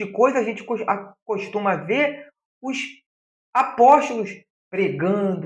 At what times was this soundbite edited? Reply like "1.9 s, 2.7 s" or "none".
none